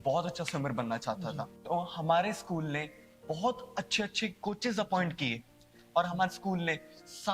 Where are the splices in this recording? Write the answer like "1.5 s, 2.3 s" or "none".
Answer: 1.5 s, 5.8 s